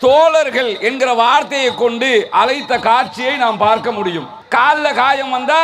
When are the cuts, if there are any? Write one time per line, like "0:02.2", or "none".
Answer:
0:04.3